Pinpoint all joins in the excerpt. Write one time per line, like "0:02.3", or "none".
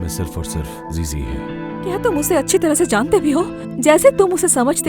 0:02.0